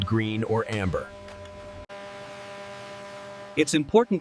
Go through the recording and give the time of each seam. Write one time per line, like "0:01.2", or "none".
0:01.8